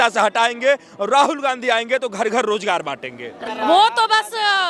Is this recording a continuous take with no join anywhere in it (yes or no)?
no